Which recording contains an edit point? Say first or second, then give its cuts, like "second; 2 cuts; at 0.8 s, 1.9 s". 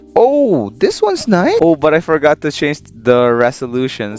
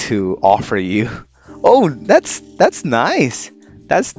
first; 1 cut; at 1.6 s